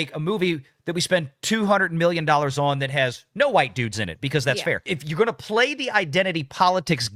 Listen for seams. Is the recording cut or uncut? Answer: uncut